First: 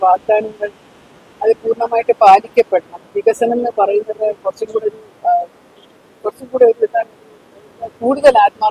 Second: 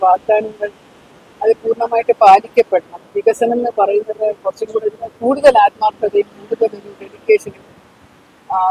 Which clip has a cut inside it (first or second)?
second